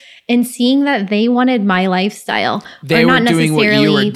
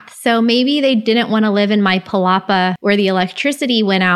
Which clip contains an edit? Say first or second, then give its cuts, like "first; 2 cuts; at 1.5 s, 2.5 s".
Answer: second; 1 cut; at 2.8 s